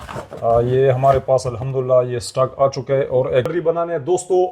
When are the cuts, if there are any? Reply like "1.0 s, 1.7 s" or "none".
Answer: 3.5 s

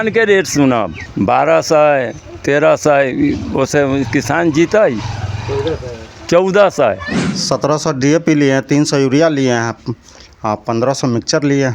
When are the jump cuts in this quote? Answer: 1.0 s, 7.2 s

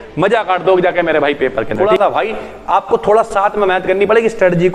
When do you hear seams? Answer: 1.9 s

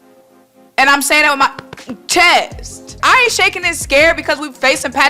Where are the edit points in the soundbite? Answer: 3.0 s

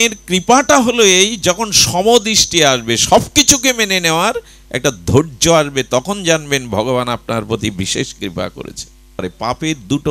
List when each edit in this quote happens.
9.2 s

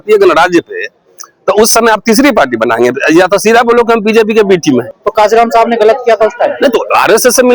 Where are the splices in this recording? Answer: 5.0 s

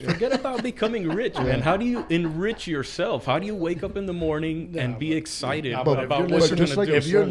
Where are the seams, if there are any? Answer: none

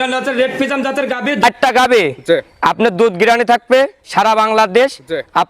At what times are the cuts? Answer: 1.4 s

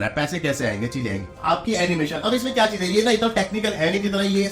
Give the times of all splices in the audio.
1.4 s

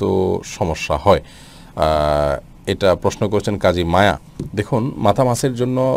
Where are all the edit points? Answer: none

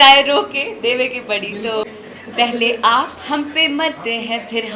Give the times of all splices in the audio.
1.9 s

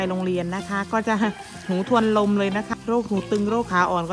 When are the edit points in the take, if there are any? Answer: 2.7 s

